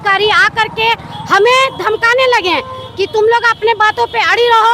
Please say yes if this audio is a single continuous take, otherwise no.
yes